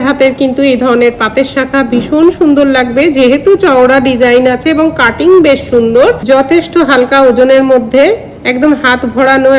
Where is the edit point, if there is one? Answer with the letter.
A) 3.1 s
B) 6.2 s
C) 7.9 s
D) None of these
B